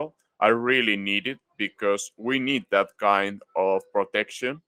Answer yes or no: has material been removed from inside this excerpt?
no